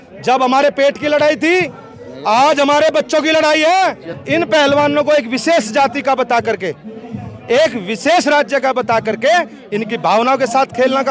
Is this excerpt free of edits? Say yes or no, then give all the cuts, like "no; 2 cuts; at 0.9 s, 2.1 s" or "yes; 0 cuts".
no; 1 cut; at 4.1 s